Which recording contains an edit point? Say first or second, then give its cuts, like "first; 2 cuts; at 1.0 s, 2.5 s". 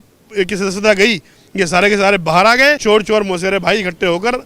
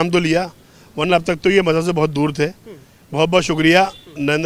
first; 1 cut; at 2.8 s